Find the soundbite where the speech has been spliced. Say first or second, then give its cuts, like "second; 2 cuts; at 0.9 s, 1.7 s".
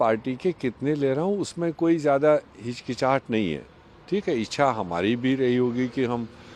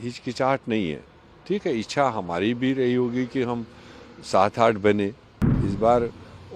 second; 1 cut; at 5.4 s